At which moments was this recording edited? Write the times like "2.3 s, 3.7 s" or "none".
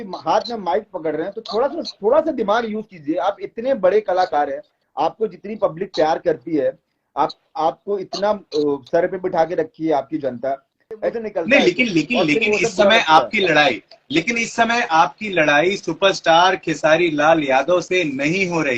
11.1 s